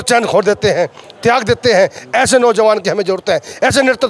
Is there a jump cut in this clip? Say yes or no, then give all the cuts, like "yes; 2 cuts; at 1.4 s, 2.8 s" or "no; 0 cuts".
no; 0 cuts